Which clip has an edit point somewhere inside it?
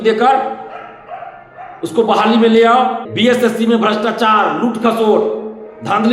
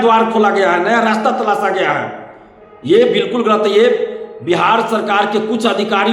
first; 1 cut; at 3.1 s

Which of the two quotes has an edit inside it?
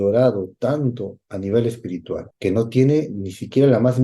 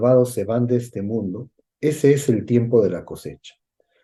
first; 1 cut; at 2.3 s

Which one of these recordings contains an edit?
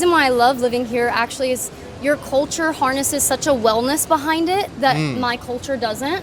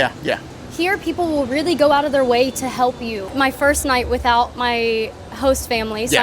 second; 1 cut; at 3.3 s

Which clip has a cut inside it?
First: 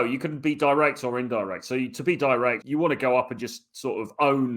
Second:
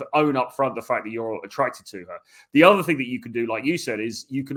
first; 1 cut; at 2.6 s

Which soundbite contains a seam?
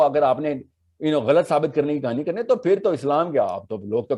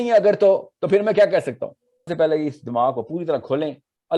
second; 1 cut; at 2.1 s

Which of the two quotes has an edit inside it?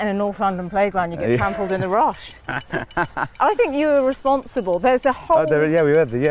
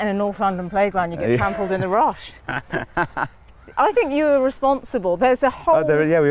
first; 1 cut; at 3.3 s

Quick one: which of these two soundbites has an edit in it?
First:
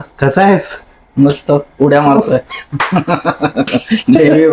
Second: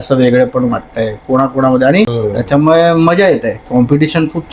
second; 1 cut; at 2.1 s

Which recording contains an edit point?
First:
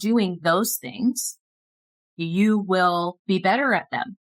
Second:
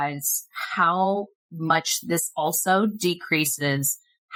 first; 1 cut; at 3.2 s

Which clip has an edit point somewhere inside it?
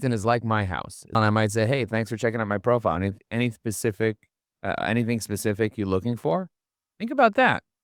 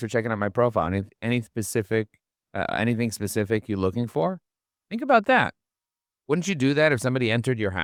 first; 1 cut; at 1.2 s

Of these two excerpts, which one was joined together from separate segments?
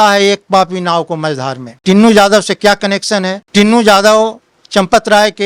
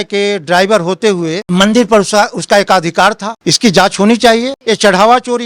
second; 2 cuts; at 3.4 s, 4.5 s

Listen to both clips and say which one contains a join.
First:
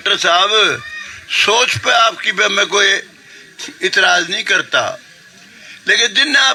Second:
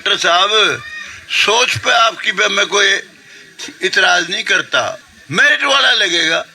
second; 1 cut; at 5.1 s

